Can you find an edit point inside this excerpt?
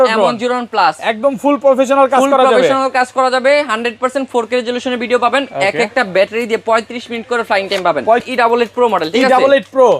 yes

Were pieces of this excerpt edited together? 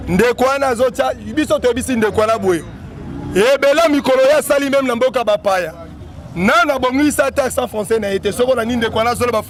no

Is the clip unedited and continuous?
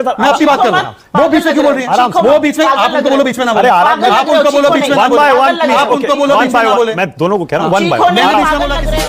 yes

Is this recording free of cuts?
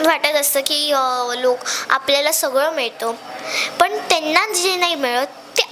yes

